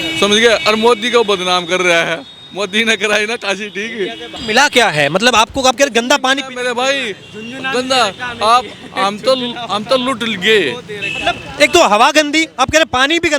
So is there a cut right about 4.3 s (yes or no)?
yes